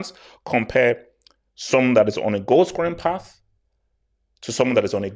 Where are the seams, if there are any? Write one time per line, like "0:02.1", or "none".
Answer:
none